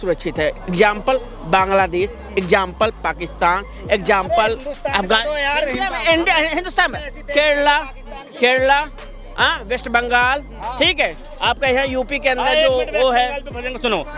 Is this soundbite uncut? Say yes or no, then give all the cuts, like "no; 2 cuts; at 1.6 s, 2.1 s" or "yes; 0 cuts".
yes; 0 cuts